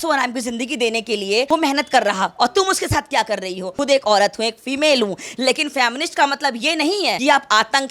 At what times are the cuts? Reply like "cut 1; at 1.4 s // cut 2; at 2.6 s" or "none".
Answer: cut 1; at 3.7 s